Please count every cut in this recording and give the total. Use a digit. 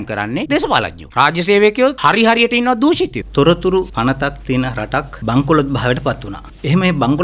2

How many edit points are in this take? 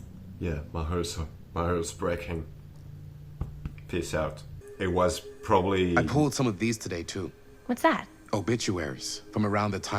1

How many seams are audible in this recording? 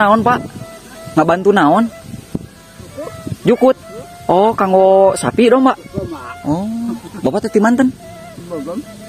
0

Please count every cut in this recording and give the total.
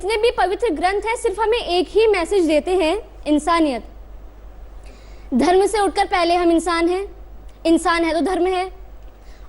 0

